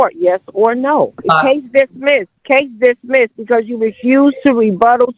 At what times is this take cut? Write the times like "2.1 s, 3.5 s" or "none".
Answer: 1.2 s, 2.3 s